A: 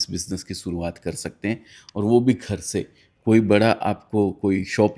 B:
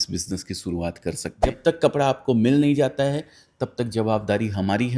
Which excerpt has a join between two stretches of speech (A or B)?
B